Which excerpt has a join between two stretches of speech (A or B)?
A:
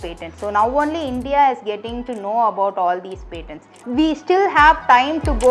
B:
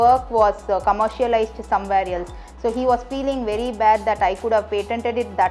A